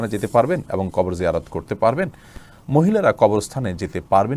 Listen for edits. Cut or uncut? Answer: uncut